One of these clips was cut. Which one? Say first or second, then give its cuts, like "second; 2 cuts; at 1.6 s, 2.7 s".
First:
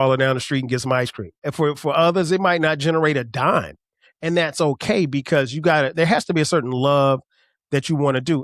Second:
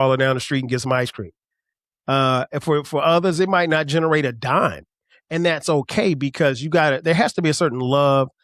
first; 1 cut; at 1.4 s